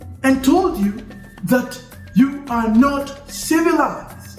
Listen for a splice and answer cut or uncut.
uncut